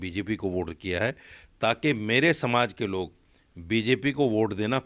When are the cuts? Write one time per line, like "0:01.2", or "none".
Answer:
none